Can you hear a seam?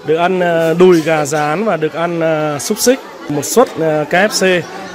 yes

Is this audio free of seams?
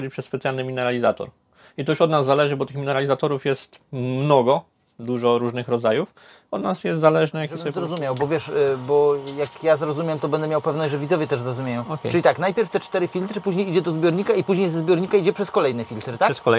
no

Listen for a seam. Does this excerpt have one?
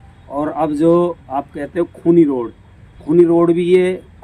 no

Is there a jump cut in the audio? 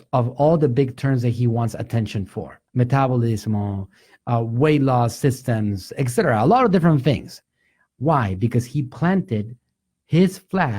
yes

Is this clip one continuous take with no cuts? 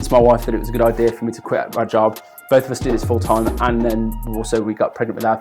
yes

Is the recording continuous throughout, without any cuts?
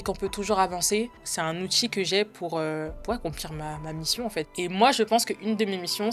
no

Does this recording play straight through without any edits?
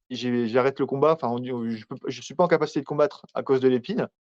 yes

